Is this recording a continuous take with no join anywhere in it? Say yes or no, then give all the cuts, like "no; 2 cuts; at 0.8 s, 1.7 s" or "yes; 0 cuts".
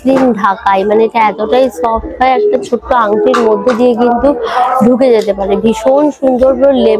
yes; 0 cuts